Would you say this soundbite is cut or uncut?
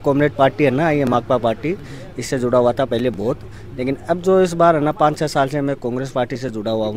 uncut